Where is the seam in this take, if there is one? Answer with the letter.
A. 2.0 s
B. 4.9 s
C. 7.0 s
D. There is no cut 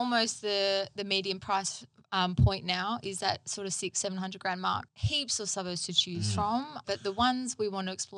B